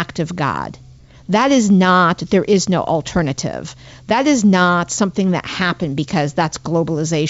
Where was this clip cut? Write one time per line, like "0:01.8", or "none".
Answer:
none